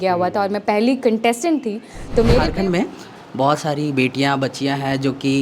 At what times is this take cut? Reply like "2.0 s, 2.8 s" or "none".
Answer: 2.5 s